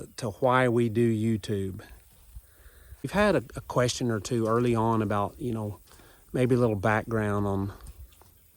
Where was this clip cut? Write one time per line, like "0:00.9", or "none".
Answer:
0:03.1